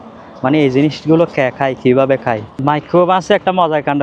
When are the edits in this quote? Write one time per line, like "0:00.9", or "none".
0:02.5